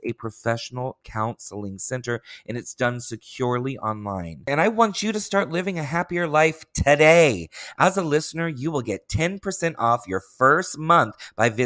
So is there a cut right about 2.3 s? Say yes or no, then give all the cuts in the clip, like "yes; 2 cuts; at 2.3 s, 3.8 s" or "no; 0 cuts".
no; 1 cut; at 4.4 s